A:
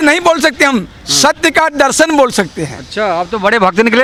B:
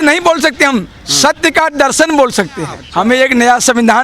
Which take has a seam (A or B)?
B